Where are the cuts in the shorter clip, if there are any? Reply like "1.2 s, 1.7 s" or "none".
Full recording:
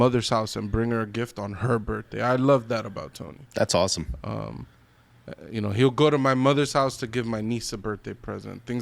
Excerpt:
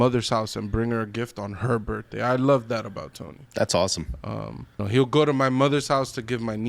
4.8 s